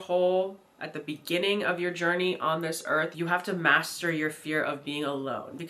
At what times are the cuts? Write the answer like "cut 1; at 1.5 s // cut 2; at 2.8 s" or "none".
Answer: cut 1; at 3.1 s